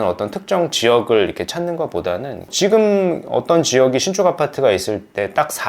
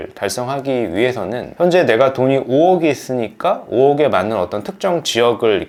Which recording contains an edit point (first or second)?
first